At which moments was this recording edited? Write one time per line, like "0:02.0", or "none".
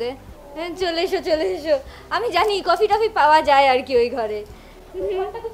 none